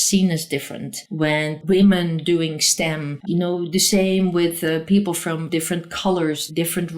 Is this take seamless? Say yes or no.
no